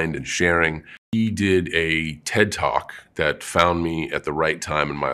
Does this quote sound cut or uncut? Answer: cut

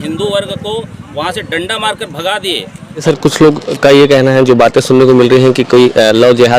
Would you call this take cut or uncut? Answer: cut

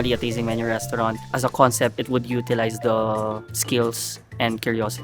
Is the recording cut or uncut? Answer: cut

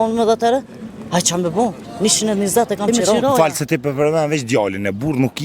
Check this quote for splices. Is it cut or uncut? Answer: cut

